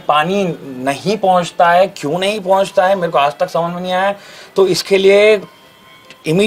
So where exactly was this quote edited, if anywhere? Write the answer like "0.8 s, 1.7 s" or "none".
none